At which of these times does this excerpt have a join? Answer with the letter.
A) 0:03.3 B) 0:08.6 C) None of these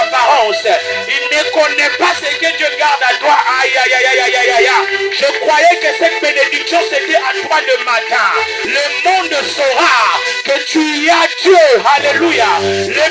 B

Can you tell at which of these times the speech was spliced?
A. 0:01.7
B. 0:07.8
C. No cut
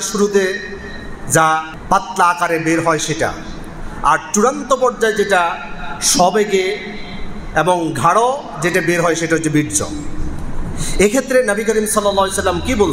A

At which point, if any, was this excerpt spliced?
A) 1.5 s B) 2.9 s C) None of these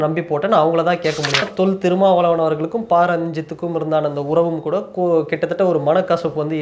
A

